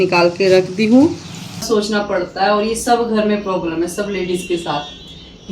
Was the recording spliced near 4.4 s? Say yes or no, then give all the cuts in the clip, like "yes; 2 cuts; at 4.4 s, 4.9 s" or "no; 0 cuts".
no; 1 cut; at 1.5 s